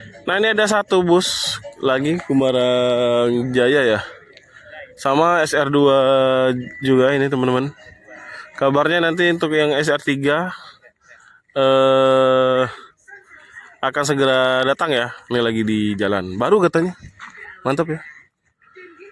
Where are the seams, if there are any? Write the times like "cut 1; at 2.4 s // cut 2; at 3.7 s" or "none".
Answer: none

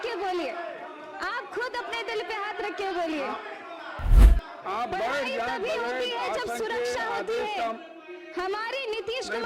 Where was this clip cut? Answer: cut 1; at 4.2 s

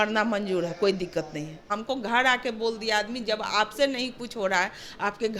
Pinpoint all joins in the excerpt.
cut 1; at 1.8 s

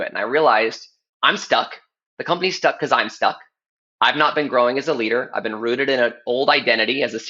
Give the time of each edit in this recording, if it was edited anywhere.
none

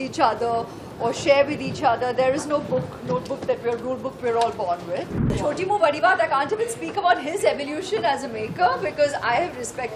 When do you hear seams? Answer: cut 1; at 5.3 s

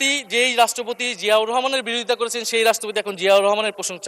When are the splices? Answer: none

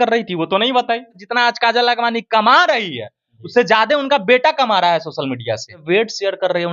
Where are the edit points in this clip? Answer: cut 1; at 1.2 s // cut 2; at 5.8 s

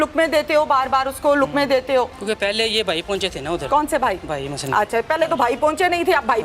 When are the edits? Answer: cut 1; at 2.2 s

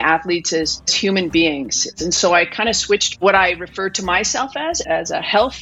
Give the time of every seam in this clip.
cut 1; at 0.9 s // cut 2; at 1.9 s // cut 3; at 3.2 s // cut 4; at 4.8 s

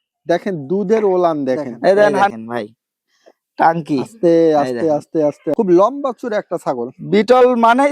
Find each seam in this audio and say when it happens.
cut 1; at 2.3 s // cut 2; at 5.5 s

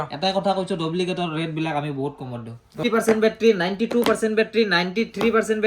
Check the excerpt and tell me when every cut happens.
cut 1; at 2.8 s

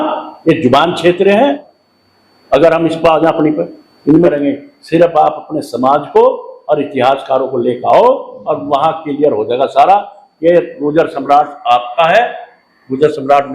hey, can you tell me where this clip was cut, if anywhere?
cut 1; at 1.7 s // cut 2; at 4.3 s

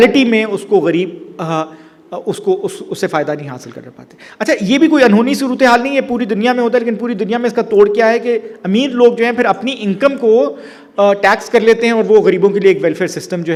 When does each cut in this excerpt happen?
none

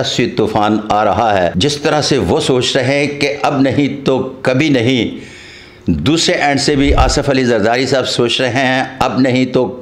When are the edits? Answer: cut 1; at 1.5 s

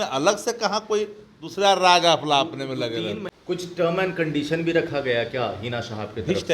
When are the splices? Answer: cut 1; at 3.3 s

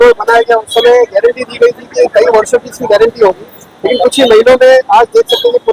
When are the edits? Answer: none

